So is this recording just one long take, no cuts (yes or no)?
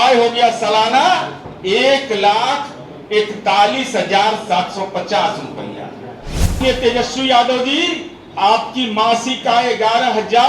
no